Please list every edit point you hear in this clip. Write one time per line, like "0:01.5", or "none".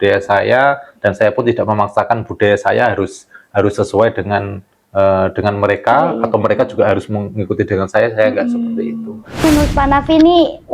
0:09.4